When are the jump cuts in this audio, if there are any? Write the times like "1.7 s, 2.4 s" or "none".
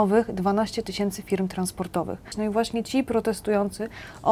2.3 s